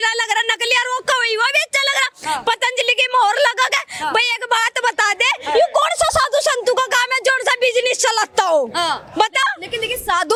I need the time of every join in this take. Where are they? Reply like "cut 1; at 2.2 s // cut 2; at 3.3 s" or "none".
none